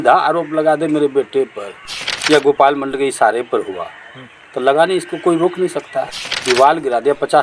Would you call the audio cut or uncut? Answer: cut